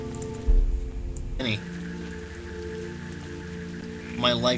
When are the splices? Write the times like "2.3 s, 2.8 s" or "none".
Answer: none